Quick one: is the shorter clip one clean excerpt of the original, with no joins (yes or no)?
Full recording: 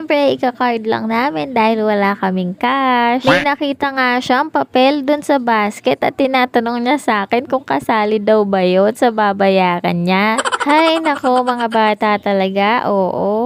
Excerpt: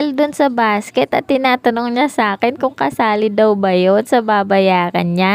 yes